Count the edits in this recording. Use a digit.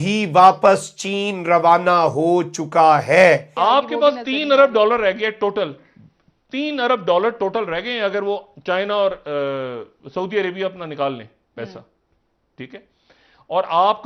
1